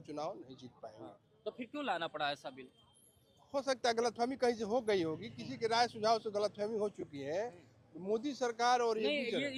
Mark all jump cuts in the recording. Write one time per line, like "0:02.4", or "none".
none